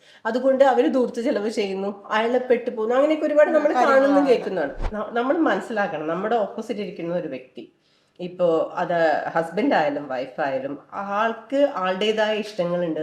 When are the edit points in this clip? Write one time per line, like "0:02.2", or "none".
0:04.8

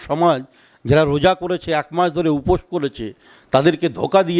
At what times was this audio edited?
none

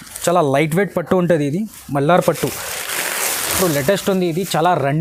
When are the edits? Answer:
none

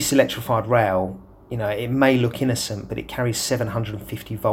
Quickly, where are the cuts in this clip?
none

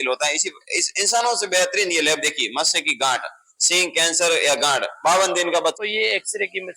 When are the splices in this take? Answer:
0:05.8

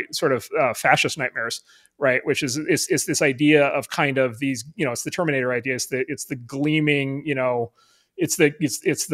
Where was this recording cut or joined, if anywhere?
none

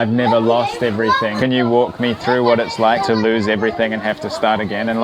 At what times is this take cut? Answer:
none

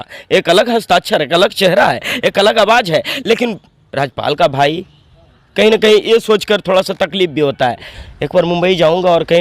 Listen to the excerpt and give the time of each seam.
0:07.9

